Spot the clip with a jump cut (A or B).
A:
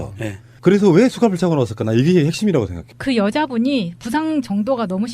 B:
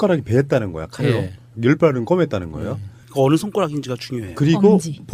A